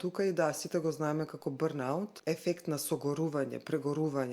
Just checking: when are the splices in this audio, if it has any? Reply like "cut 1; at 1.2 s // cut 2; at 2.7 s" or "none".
cut 1; at 2.1 s